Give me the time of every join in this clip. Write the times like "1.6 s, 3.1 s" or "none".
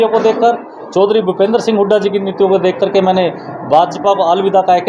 none